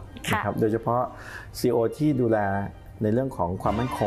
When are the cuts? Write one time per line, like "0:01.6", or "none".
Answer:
none